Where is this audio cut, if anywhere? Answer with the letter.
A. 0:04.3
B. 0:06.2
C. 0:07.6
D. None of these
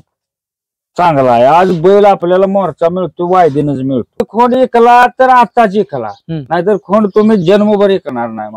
A